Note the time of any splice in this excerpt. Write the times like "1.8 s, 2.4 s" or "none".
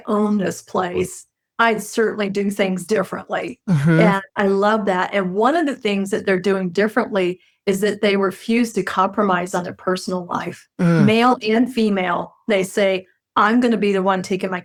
none